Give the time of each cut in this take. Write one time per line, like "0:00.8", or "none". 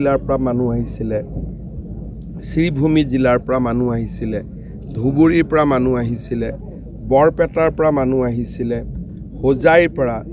none